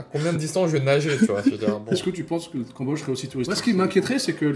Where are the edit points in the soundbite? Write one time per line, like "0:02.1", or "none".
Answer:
0:01.9
0:03.5